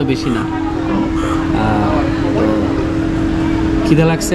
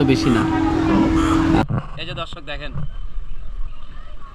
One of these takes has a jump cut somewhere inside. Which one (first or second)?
second